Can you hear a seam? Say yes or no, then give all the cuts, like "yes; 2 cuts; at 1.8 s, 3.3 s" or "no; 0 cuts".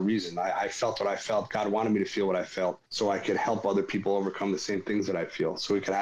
yes; 1 cut; at 2.8 s